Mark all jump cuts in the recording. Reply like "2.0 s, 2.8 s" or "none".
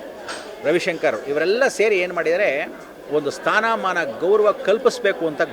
3.1 s